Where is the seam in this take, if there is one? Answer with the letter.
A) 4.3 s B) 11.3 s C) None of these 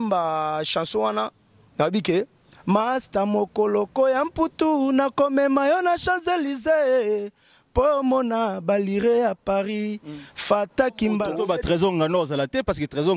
B